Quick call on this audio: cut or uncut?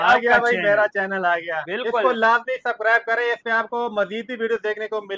uncut